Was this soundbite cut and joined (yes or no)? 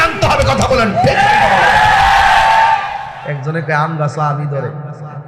yes